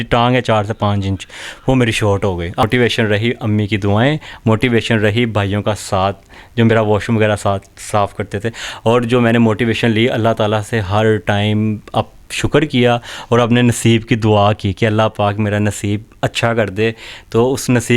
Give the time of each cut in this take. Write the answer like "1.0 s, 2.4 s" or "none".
2.6 s